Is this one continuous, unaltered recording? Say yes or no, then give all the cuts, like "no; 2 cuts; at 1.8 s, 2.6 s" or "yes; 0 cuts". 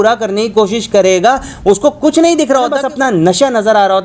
no; 1 cut; at 2.6 s